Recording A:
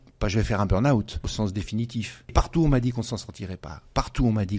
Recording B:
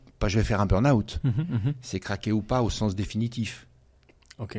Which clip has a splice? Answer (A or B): A